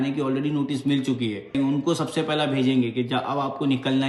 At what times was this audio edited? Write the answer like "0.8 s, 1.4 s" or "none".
none

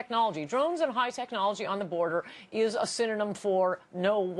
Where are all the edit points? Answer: 2.9 s

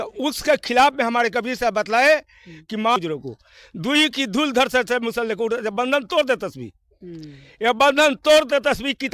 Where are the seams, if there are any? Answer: 3.0 s

